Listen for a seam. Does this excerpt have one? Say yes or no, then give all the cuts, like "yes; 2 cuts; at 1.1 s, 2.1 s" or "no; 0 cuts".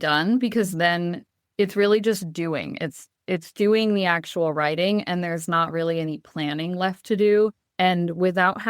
yes; 1 cut; at 7.6 s